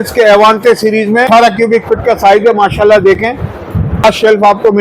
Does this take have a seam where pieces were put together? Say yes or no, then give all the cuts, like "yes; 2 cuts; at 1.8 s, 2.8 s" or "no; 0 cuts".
yes; 2 cuts; at 1.3 s, 4.0 s